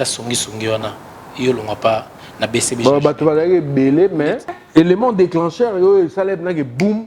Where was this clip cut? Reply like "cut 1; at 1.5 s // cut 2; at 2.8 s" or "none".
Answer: cut 1; at 4.6 s